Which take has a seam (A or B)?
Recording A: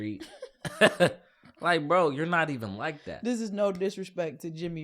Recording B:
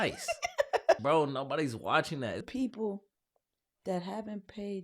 B